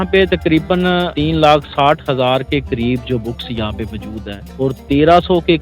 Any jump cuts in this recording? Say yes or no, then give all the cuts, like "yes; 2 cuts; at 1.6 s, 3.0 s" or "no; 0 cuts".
yes; 1 cut; at 1.1 s